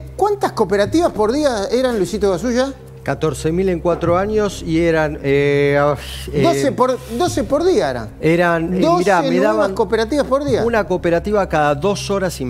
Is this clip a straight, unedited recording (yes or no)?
yes